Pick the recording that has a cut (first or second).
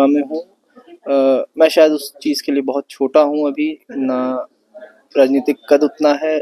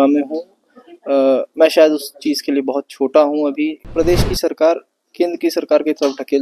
second